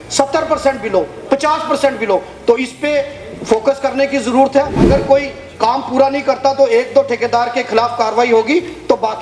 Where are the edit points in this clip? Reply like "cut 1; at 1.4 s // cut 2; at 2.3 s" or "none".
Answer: cut 1; at 4.8 s